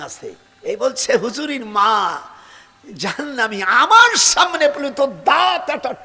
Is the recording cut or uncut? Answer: uncut